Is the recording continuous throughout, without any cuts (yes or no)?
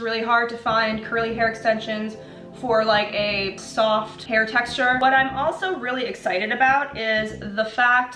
no